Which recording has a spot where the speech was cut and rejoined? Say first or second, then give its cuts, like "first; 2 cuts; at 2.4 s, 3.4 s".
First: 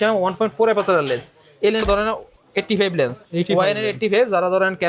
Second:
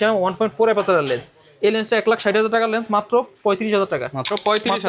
first; 1 cut; at 1.8 s